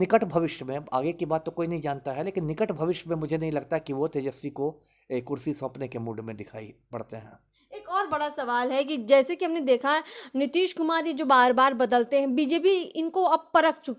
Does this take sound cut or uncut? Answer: uncut